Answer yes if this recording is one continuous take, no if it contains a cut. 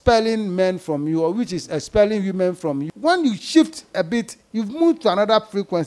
no